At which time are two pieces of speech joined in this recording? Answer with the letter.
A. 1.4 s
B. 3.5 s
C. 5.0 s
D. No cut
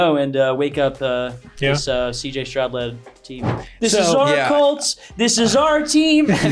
B